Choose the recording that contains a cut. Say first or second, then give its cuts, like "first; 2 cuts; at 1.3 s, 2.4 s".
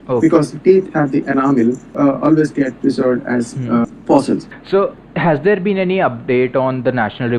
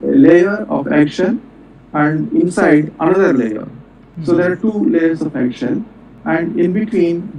first; 3 cuts; at 1.9 s, 3.9 s, 4.6 s